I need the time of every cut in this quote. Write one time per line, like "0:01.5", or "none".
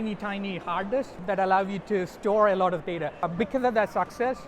0:01.1
0:03.3